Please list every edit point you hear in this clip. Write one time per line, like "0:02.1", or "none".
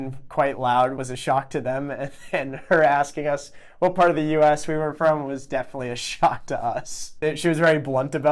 0:00.9